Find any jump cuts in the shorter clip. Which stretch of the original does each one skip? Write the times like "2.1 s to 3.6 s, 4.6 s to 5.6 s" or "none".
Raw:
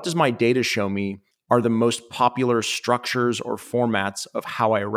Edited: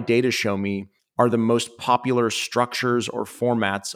none

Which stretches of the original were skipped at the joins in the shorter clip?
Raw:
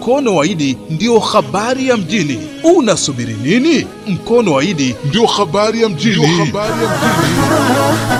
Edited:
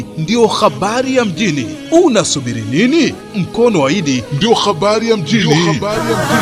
none

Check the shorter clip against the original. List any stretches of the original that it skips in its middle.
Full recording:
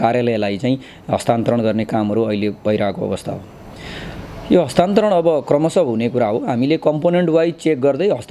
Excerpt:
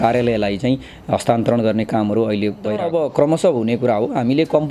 2.8 s to 5.1 s

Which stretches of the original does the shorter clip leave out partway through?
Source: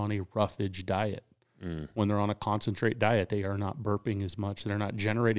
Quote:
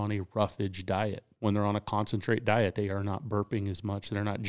1.3 s to 1.8 s

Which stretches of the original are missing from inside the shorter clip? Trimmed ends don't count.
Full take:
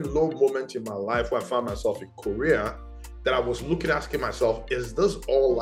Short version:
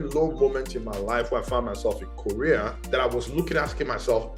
2.8 s to 3.1 s

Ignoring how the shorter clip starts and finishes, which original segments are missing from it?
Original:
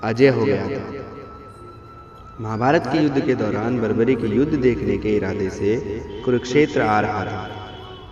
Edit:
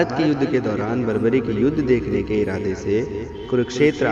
none

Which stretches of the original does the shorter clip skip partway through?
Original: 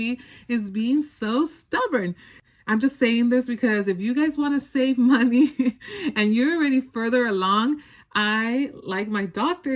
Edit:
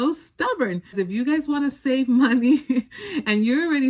2.3 s to 3.8 s

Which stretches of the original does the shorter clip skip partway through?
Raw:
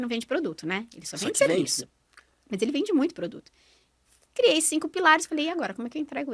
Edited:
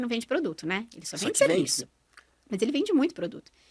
none

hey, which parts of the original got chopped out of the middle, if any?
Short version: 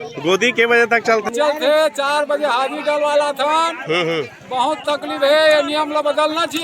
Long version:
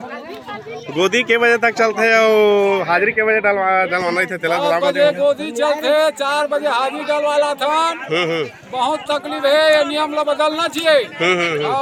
2.0 s to 5.5 s

